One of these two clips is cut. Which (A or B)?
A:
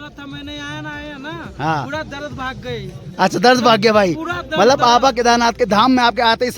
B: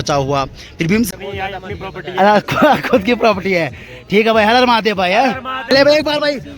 B